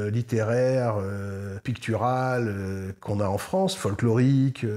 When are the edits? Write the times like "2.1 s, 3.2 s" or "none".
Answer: 1.6 s